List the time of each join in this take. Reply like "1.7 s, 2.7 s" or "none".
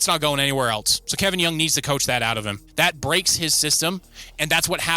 1.0 s, 2.6 s